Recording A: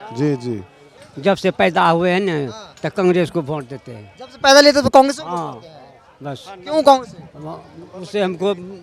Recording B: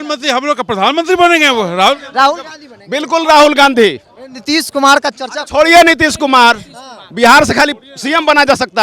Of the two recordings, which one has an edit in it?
A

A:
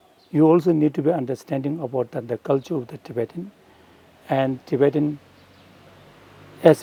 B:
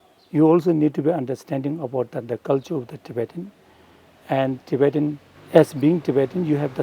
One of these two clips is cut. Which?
B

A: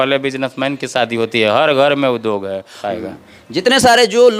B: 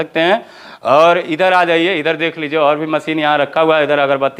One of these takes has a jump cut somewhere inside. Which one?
A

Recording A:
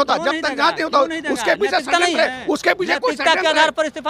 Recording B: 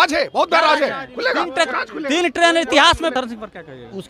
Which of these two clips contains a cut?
B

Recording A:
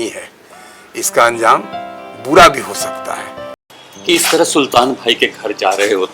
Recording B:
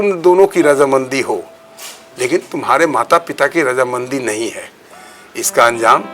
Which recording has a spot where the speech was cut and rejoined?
A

